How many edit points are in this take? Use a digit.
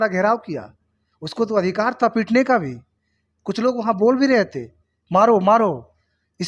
0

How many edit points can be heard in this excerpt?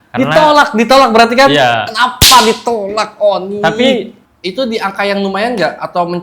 1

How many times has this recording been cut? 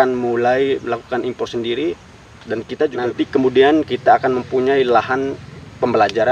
1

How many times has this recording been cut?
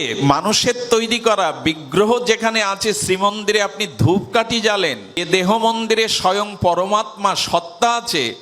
1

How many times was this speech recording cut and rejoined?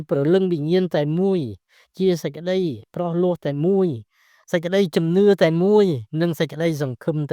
0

